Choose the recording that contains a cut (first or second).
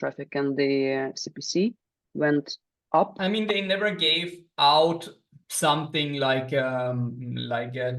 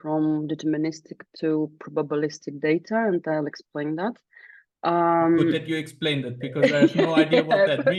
first